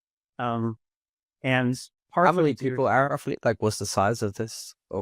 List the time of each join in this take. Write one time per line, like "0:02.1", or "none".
0:03.1